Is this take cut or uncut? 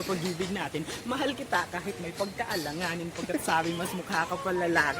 uncut